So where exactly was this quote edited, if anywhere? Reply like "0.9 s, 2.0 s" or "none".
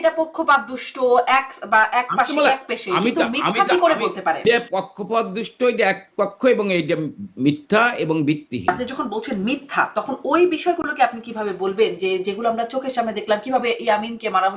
4.4 s, 8.7 s